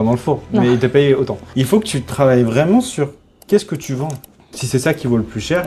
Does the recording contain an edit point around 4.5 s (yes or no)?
yes